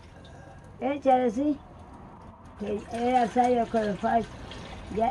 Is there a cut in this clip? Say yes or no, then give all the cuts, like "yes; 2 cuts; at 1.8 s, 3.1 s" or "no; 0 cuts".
no; 0 cuts